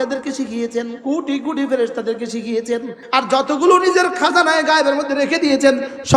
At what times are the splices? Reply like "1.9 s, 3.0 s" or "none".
0.9 s, 3.0 s